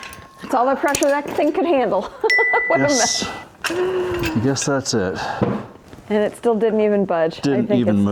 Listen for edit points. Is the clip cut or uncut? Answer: uncut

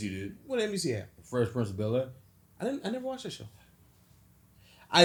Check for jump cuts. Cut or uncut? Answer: uncut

